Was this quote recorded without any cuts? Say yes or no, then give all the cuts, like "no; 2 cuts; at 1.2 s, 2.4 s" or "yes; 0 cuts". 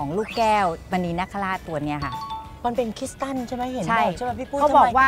yes; 0 cuts